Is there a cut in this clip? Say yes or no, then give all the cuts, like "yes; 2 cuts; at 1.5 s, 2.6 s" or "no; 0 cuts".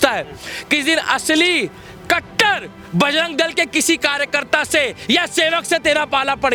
no; 0 cuts